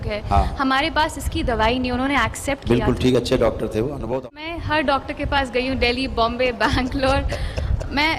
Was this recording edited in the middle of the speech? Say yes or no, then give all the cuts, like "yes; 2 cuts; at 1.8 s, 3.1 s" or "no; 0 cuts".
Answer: yes; 1 cut; at 4.2 s